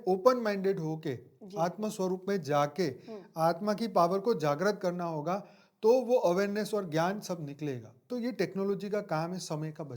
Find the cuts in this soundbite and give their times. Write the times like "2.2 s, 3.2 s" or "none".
8.0 s

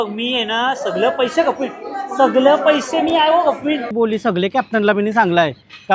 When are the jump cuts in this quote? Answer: 3.9 s

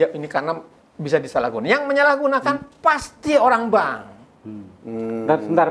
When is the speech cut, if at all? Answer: none

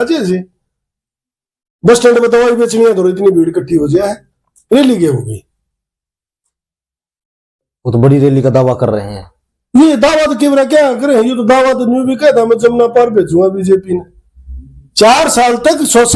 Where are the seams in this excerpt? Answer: none

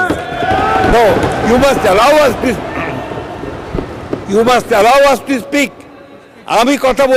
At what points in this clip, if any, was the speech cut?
none

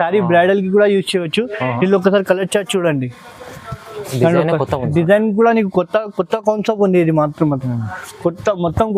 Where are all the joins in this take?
none

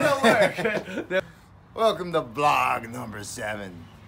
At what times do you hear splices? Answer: 1.2 s

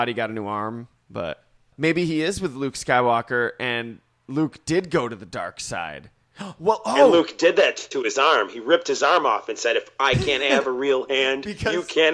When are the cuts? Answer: 1.7 s

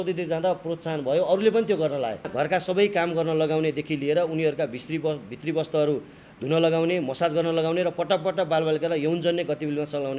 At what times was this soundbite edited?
2.3 s

